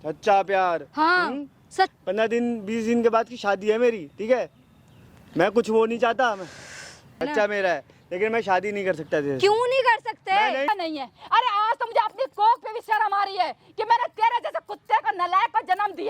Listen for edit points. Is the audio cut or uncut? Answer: cut